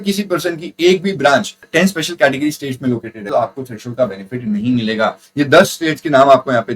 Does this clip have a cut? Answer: yes; 3 cuts; at 1.7 s, 3.1 s, 5.2 s

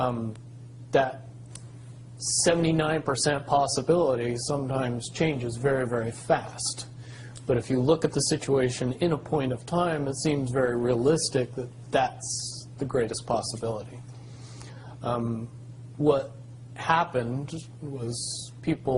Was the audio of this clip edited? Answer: no; 0 cuts

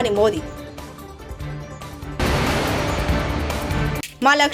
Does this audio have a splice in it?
no; 0 cuts

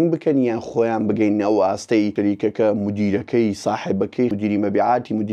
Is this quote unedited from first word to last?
no; 2 cuts; at 2.1 s, 4.3 s

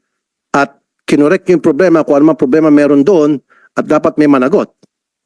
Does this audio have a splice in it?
no; 0 cuts

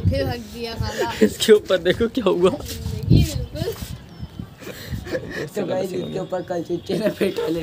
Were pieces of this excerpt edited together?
no; 0 cuts

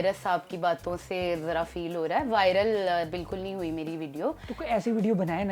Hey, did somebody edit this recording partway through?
no; 0 cuts

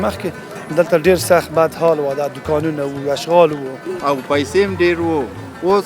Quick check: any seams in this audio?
yes; 1 cut; at 3.9 s

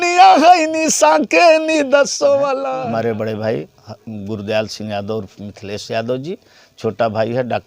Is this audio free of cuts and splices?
no; 1 cut; at 2.6 s

